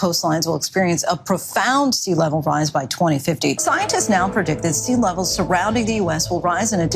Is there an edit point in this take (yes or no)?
yes